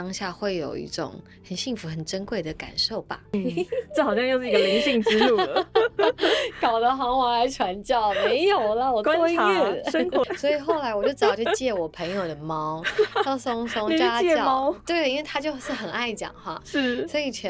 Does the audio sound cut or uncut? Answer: cut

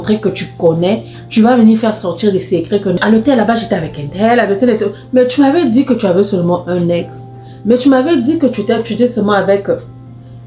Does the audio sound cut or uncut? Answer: cut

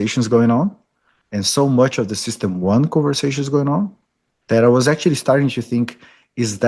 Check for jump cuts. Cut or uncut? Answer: uncut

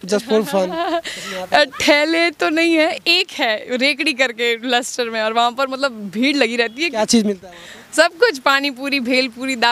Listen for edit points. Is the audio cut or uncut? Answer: uncut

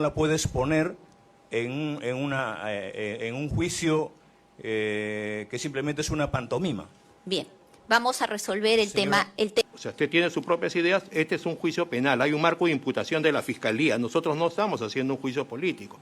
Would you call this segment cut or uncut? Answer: cut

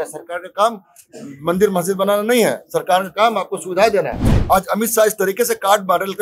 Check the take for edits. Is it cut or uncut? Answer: cut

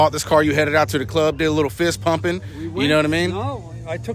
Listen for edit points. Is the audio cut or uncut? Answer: uncut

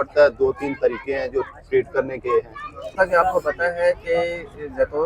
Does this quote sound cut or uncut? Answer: cut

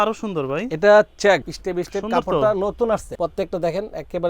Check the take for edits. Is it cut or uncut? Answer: cut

